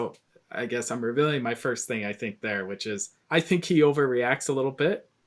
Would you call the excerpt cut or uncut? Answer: cut